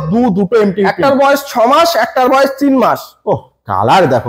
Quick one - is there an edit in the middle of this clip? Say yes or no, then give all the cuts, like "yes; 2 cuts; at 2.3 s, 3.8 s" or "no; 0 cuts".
no; 0 cuts